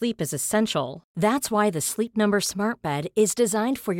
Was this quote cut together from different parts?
no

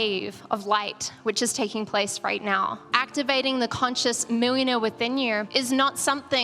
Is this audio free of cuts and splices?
no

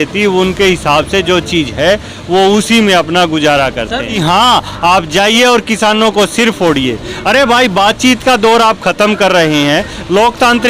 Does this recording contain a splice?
yes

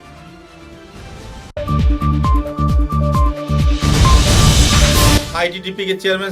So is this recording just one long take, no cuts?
no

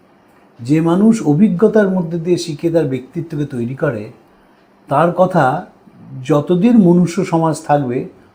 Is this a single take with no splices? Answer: yes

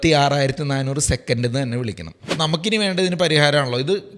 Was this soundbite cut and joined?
yes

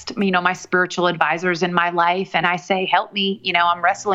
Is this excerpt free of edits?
no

